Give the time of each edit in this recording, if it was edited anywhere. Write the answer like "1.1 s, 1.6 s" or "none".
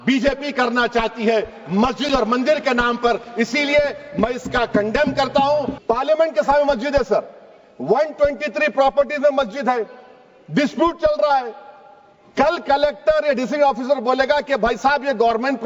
5.7 s